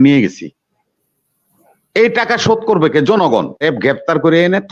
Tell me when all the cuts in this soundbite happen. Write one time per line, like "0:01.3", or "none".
0:03.6